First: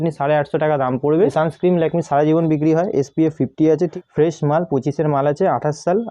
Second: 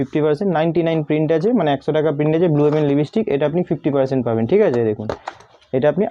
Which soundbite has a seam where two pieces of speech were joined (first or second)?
first